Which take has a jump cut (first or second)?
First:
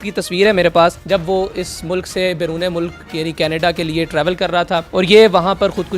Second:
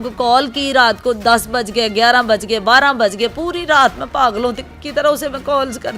first